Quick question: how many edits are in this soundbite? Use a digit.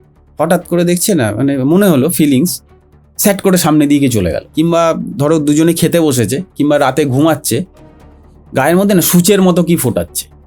1